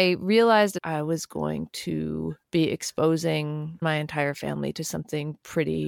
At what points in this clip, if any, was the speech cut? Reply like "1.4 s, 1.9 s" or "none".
0.8 s, 2.4 s, 3.8 s